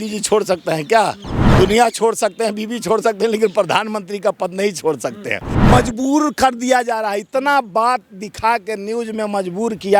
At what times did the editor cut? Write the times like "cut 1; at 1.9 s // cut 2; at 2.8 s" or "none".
cut 1; at 5.5 s